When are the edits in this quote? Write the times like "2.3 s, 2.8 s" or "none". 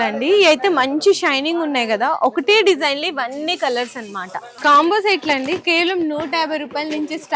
4.4 s